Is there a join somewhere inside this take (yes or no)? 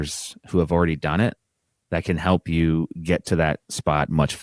no